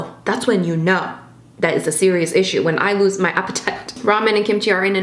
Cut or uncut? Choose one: cut